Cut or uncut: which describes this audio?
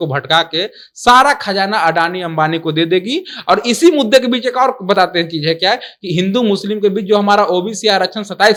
uncut